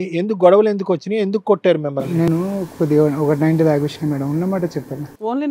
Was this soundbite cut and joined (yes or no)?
no